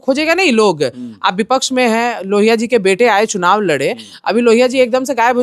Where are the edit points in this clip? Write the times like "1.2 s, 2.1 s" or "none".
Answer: none